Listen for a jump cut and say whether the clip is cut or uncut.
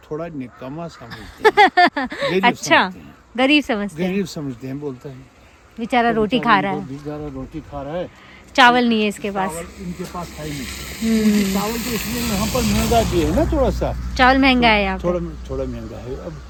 uncut